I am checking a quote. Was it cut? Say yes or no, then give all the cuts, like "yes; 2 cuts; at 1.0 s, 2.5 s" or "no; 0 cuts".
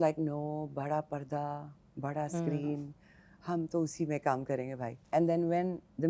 no; 0 cuts